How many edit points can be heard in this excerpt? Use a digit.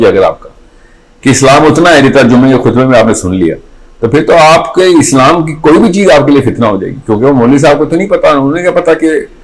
0